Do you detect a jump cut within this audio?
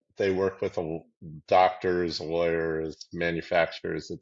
no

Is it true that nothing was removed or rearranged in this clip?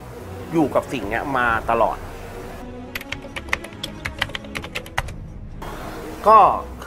yes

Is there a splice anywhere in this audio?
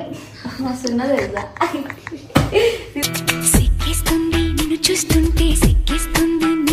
no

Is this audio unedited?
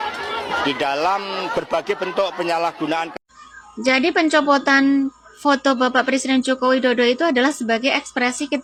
yes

